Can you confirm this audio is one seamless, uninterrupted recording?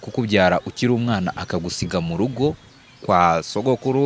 yes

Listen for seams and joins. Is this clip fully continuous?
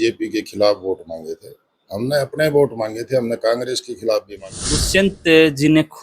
no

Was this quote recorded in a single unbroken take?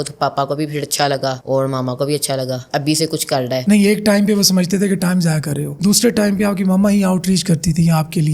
yes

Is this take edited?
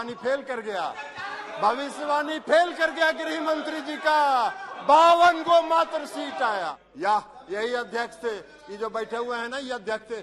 yes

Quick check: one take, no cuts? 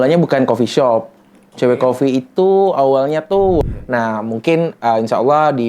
no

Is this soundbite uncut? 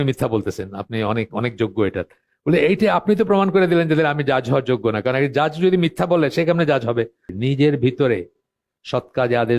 no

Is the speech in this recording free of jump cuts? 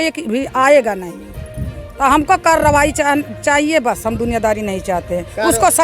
no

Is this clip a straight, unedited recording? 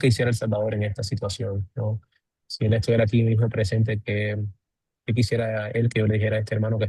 yes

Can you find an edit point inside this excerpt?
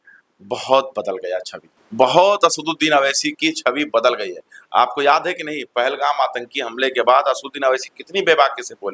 no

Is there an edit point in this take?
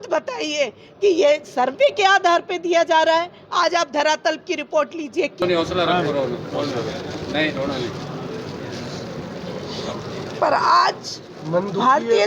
yes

